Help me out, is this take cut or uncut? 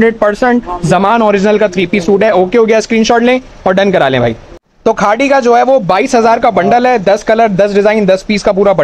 uncut